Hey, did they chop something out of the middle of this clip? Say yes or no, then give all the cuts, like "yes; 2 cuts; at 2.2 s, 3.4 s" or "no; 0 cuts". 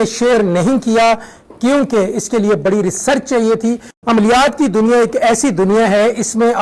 yes; 1 cut; at 3.9 s